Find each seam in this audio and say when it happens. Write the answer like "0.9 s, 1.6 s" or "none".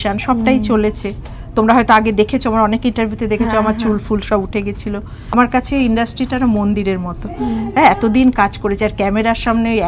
5.2 s